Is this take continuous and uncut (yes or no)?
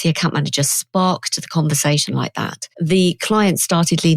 no